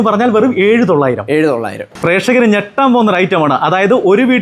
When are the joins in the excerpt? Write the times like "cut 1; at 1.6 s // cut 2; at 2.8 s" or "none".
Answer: cut 1; at 1.9 s